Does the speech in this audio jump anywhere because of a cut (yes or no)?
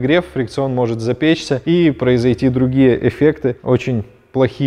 no